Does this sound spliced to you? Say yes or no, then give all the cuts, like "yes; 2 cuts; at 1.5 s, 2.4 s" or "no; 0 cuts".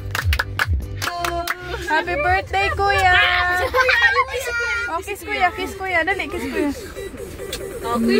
yes; 1 cut; at 1.1 s